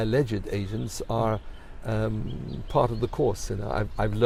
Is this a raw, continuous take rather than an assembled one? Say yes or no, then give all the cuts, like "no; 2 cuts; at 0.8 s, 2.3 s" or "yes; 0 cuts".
yes; 0 cuts